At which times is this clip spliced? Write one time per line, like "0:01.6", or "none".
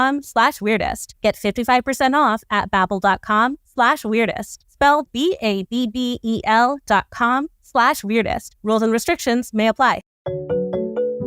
none

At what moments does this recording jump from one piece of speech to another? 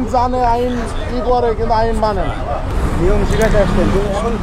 0:02.7

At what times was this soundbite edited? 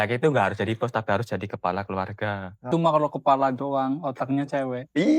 0:02.6

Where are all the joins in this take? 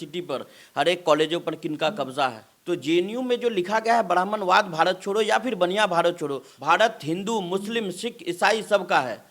0:02.5
0:06.5

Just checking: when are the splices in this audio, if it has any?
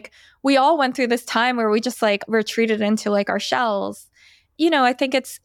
0:02.2
0:04.5

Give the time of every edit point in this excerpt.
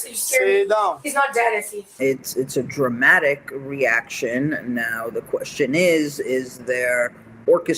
0:01.9

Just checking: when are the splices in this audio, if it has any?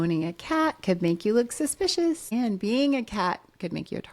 0:02.3

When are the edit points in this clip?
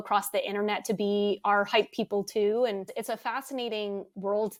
none

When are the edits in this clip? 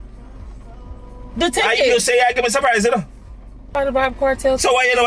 0:00.9
0:03.7

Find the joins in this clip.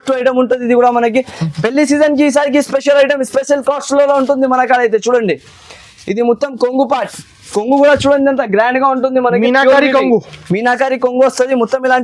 none

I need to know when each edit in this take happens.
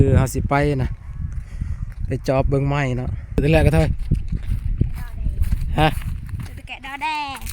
0:03.4

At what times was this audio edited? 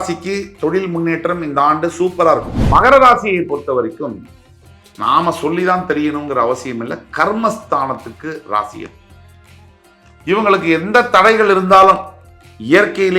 0:02.5

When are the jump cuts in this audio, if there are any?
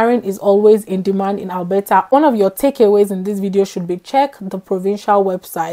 0:02.1

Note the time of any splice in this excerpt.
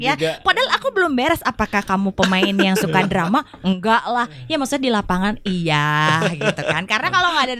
none

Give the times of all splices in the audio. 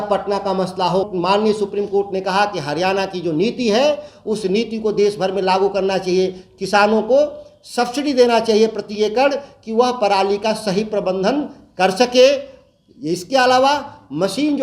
0:01.1

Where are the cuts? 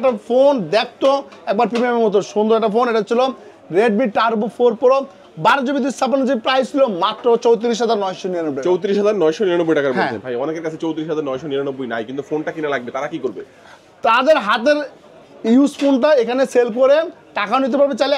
none

